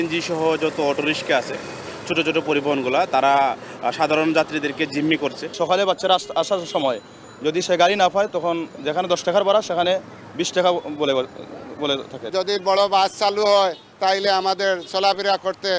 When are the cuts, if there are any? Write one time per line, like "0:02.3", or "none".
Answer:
none